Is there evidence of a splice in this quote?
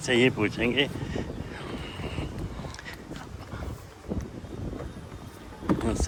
no; 0 cuts

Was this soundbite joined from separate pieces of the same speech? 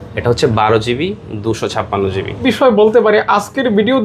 yes; 1 cut; at 2.4 s

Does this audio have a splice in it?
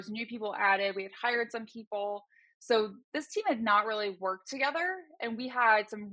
no; 0 cuts

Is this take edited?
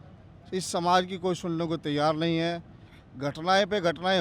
no; 0 cuts

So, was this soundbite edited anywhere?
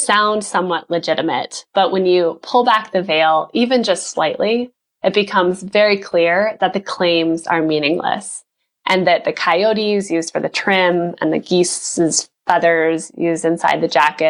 no; 0 cuts

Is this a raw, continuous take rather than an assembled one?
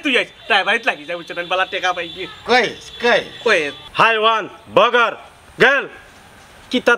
no; 1 cut; at 3.8 s

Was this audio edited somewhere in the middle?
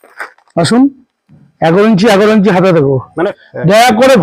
yes; 1 cut; at 3.3 s

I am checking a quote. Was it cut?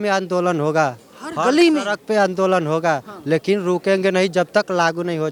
no; 0 cuts

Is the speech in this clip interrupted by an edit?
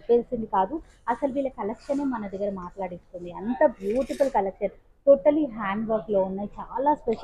no; 0 cuts

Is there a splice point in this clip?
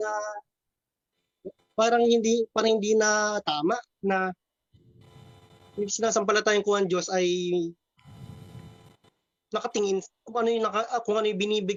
no; 0 cuts

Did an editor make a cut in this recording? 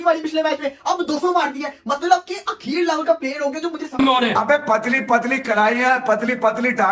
yes; 1 cut; at 4.0 s

